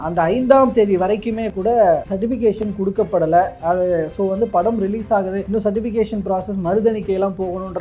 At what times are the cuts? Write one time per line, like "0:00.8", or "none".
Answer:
0:02.1
0:05.4